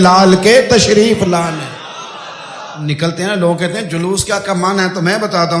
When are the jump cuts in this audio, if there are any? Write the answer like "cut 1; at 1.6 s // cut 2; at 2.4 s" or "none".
cut 1; at 2.7 s